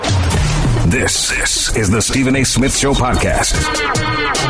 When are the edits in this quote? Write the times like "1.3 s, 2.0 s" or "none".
none

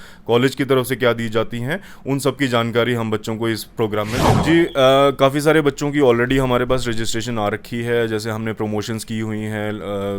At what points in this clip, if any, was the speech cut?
4.4 s

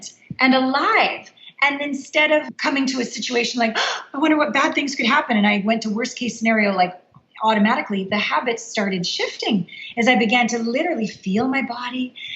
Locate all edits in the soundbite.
2.5 s

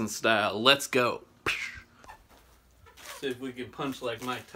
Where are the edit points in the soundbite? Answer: 1.9 s

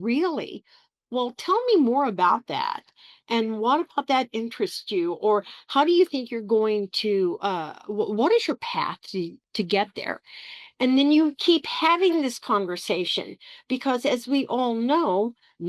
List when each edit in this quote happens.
none

